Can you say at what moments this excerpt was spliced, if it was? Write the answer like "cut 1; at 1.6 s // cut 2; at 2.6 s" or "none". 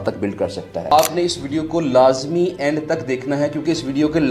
cut 1; at 0.9 s